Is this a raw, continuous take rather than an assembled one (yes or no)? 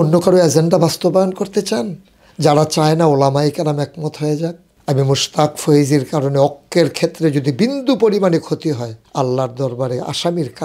no